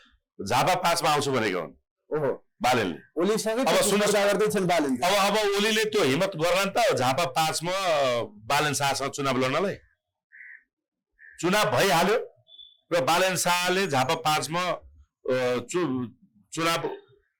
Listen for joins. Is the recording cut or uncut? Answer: uncut